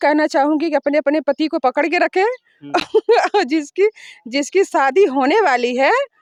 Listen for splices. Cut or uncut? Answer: uncut